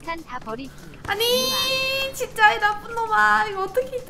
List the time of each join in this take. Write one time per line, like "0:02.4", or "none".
none